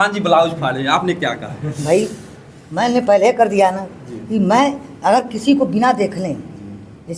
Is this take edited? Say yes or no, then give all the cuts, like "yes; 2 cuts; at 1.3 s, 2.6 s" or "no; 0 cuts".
no; 0 cuts